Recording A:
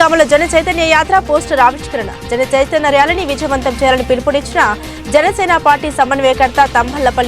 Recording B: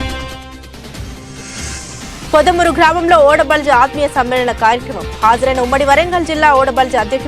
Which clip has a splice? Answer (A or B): B